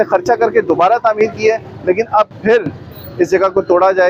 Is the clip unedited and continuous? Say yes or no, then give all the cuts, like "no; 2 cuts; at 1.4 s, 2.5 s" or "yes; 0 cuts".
yes; 0 cuts